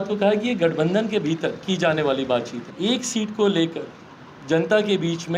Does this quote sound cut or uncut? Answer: cut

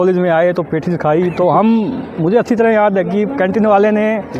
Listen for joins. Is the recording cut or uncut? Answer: uncut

